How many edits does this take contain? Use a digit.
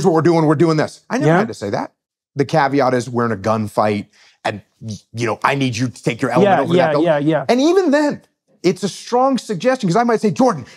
2